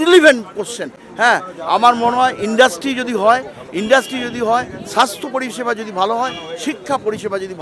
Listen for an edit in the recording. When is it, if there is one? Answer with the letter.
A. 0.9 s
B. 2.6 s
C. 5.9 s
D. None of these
D